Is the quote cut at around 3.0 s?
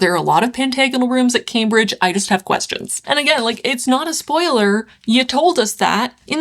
yes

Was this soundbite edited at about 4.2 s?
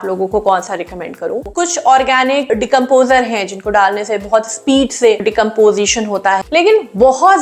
no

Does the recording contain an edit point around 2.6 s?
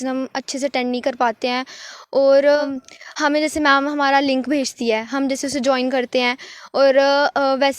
yes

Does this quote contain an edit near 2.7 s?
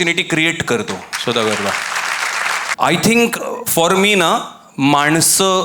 yes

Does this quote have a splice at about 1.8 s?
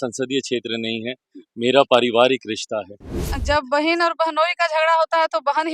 no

